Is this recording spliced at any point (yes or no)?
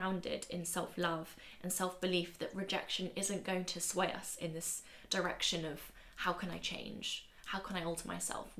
no